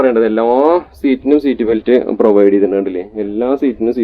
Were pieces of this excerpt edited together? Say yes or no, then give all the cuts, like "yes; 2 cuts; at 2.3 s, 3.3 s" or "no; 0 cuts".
no; 0 cuts